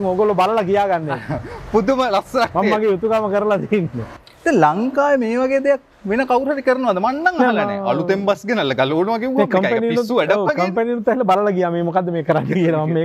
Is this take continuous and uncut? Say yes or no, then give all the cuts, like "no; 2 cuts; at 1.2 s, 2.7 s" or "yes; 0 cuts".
no; 1 cut; at 4.1 s